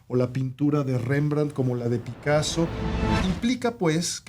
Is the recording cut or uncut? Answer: cut